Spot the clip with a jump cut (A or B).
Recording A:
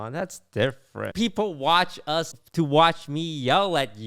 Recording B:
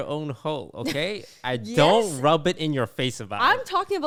A